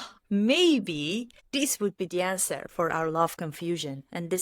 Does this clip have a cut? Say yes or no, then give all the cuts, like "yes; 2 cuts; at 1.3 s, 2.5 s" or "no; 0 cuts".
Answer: yes; 1 cut; at 1.4 s